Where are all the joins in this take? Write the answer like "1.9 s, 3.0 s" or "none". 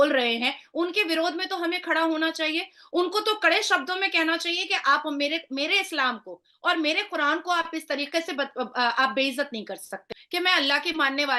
10.0 s